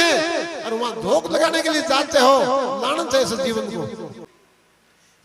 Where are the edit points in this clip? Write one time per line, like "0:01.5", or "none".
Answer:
0:04.2